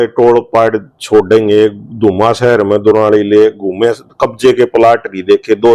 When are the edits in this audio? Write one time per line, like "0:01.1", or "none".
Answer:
none